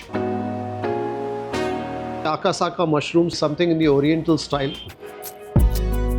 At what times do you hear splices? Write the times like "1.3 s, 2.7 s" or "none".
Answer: 4.9 s